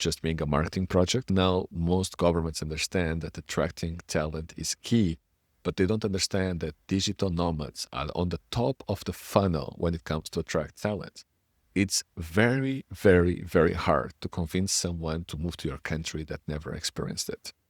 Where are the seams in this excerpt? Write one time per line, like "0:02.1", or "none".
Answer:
0:01.2